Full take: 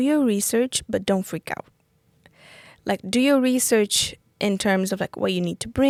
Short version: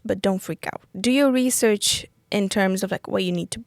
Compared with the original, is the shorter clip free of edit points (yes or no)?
no